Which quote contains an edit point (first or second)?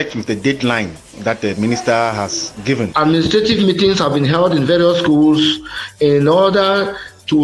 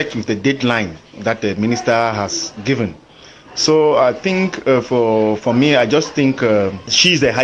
first